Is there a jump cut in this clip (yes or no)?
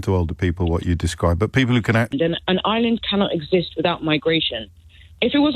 yes